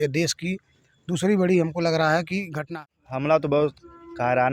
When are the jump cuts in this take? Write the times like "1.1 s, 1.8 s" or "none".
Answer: 2.6 s